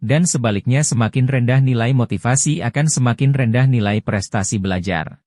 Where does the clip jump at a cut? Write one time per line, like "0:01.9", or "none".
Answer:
none